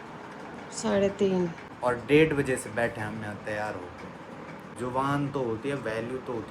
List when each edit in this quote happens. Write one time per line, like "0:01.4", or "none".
0:01.6
0:04.8